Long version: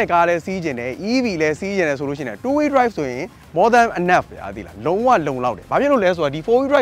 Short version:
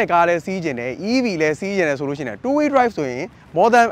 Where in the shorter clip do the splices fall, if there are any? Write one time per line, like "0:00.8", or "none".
none